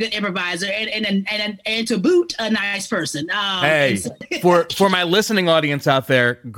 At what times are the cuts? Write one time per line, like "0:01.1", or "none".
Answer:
0:04.3